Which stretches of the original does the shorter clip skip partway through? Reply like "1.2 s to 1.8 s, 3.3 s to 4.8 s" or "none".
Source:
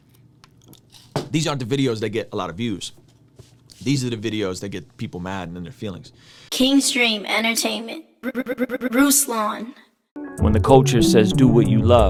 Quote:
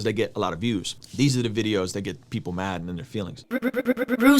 2.9 s to 3.6 s, 6.0 s to 8.1 s